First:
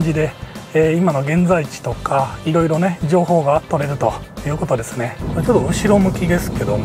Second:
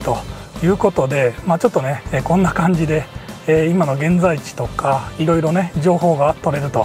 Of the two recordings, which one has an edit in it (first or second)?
first